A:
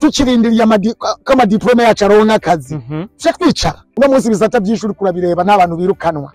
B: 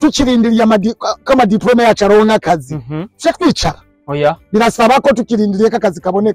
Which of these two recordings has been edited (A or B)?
A